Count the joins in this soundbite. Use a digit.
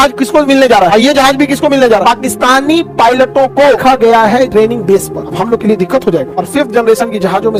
0